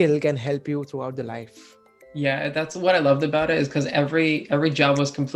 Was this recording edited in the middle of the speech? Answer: no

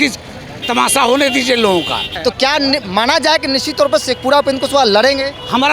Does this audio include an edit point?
yes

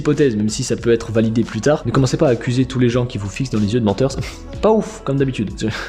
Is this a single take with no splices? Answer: no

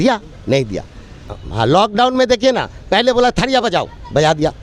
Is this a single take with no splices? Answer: no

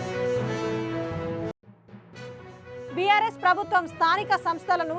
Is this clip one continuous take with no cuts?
yes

